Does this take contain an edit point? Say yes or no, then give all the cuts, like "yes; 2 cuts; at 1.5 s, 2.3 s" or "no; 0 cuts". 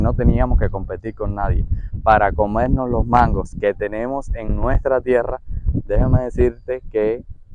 no; 0 cuts